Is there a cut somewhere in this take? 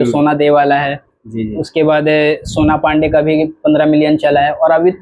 no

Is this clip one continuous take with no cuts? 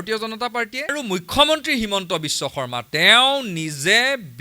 no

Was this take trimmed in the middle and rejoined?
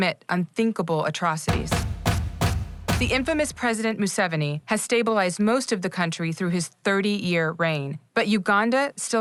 no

